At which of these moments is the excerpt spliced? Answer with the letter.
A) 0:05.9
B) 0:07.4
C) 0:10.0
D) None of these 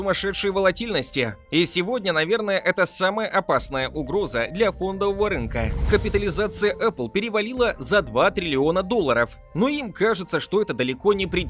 A